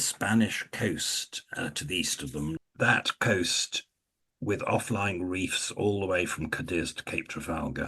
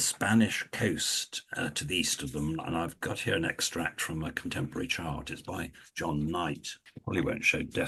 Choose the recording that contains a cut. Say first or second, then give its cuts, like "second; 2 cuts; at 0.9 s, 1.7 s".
first; 1 cut; at 2.6 s